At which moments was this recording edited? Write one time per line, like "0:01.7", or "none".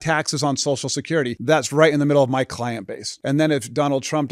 0:01.4
0:03.1